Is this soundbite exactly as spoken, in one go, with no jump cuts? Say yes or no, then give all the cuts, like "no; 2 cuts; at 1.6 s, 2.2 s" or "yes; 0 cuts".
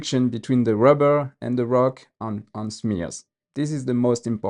yes; 0 cuts